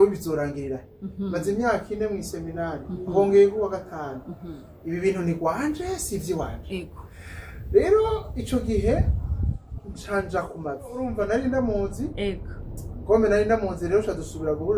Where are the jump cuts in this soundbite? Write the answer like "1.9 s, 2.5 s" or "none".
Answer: 11.1 s